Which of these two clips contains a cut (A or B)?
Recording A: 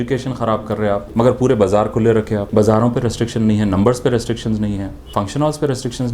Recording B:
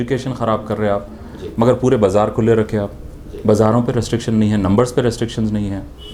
A